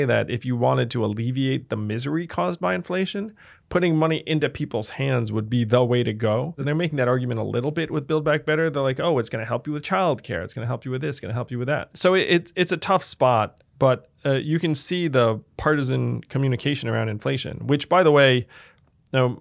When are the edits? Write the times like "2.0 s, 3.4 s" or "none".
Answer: 6.5 s, 11.9 s

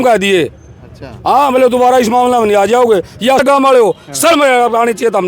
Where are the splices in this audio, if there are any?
3.4 s

